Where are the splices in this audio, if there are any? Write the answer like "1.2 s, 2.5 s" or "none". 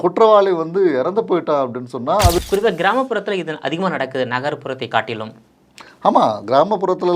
2.4 s

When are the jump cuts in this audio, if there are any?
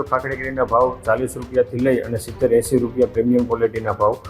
none

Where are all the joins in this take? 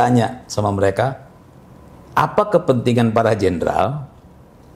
none

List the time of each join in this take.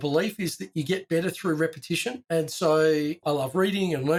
none

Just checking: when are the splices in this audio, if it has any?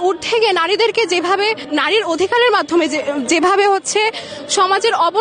1.6 s

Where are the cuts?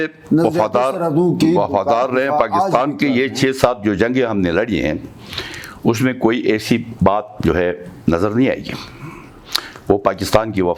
none

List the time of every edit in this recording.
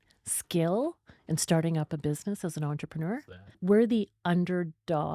3.6 s

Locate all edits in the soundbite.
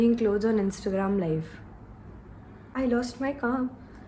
2.6 s

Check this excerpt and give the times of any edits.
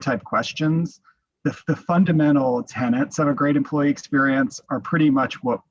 none

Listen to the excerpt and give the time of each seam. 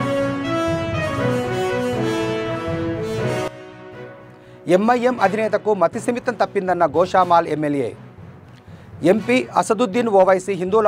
3.5 s

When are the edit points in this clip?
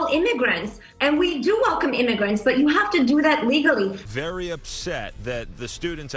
none

